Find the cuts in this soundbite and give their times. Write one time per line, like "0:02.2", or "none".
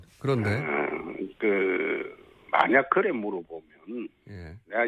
0:02.4

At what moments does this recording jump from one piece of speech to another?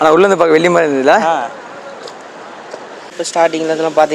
0:03.0

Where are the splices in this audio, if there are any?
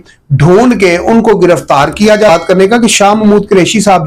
0:02.3

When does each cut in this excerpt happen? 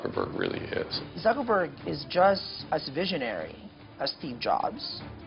0:01.0
0:02.5

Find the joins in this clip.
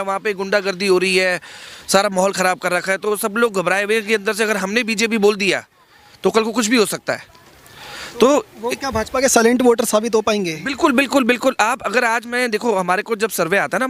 none

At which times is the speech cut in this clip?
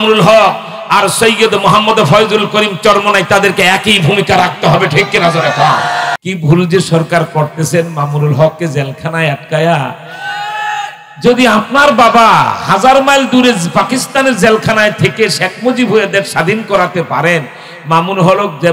0:06.1

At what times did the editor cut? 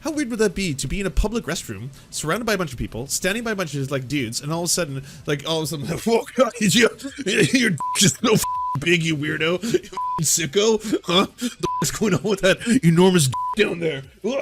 0:01.5

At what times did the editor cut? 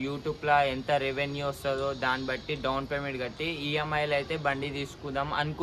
none

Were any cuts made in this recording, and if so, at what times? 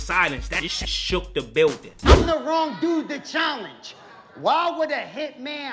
0:02.2

